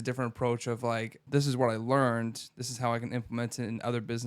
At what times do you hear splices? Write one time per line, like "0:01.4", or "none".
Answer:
0:01.2